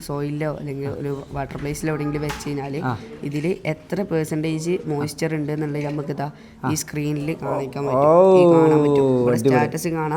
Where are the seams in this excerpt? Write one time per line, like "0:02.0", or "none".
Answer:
none